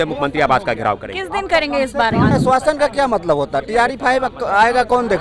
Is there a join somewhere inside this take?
yes; 1 cut; at 2.3 s

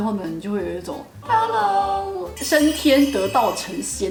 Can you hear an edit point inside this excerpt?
no; 0 cuts

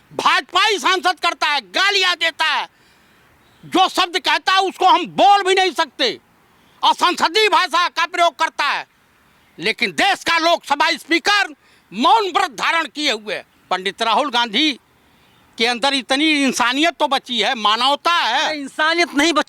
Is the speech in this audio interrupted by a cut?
no; 0 cuts

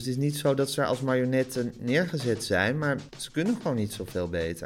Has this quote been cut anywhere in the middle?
yes; 1 cut; at 3.2 s

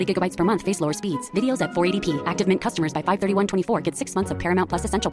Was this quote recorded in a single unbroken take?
yes; 0 cuts

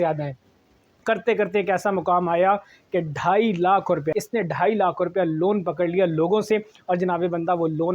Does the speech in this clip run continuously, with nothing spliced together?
no; 1 cut; at 4.1 s

